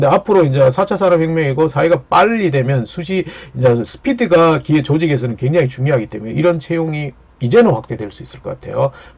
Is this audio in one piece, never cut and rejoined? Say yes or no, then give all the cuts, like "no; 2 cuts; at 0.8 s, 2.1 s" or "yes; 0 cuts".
yes; 0 cuts